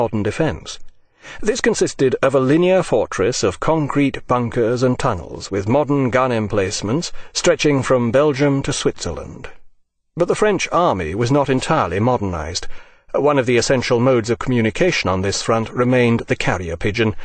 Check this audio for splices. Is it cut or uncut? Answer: cut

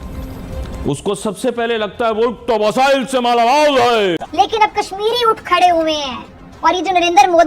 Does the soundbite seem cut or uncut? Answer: cut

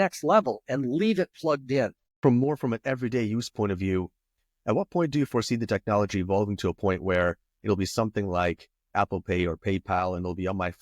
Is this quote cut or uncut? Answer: cut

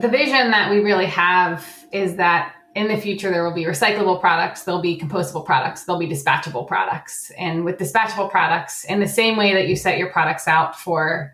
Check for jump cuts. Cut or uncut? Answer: uncut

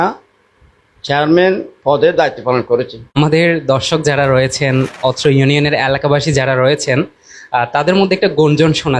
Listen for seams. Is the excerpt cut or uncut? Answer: cut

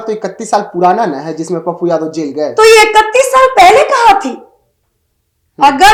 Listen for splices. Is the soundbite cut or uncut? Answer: uncut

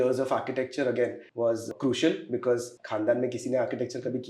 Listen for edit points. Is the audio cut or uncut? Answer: cut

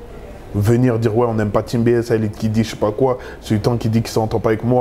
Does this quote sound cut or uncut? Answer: uncut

